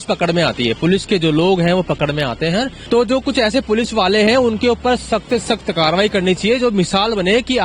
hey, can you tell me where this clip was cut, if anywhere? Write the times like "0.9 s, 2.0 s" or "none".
2.8 s